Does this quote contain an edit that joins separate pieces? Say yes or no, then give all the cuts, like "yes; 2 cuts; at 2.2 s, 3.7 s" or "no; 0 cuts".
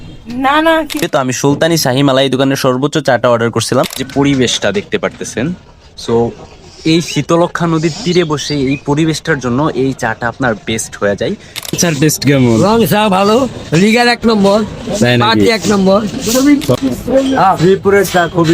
yes; 3 cuts; at 1.0 s, 4.0 s, 11.8 s